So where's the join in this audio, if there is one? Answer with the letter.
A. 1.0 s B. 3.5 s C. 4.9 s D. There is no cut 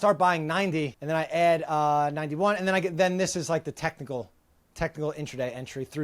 A